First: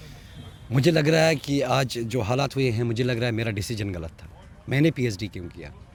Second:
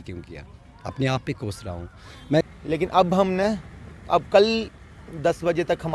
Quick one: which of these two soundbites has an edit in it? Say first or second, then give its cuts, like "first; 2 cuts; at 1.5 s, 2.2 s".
second; 1 cut; at 2.4 s